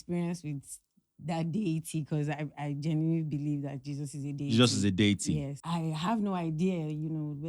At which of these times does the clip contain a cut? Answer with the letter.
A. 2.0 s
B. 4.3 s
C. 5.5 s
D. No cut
C